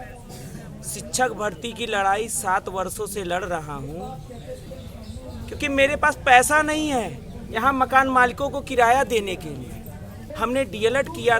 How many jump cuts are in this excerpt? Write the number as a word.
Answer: two